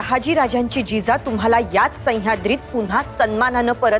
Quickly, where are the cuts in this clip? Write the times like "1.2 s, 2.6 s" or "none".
none